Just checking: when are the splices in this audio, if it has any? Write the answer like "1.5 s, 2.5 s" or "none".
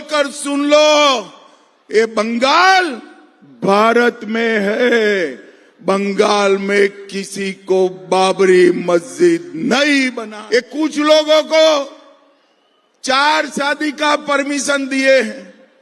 10.3 s